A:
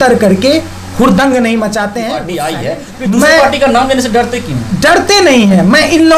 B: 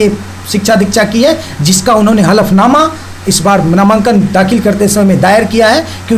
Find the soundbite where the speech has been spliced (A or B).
A